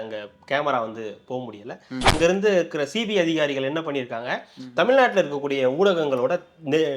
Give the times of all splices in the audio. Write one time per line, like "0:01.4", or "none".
0:02.2